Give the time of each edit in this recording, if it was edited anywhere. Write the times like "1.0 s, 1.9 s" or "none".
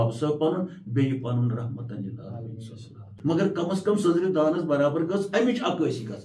3.1 s